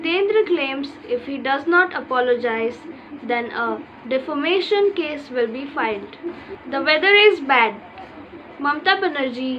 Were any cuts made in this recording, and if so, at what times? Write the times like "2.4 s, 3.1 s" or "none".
6.5 s